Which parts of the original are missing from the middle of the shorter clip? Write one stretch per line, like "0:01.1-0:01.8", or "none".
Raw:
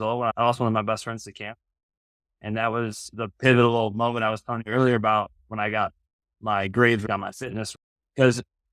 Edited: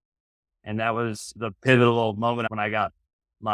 0:04.2-0:05.4